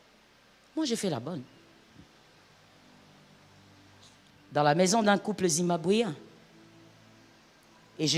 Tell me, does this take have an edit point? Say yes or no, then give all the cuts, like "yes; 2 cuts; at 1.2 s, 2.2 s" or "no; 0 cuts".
no; 0 cuts